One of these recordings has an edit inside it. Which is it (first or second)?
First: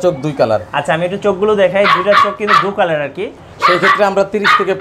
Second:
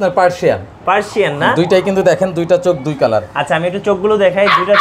first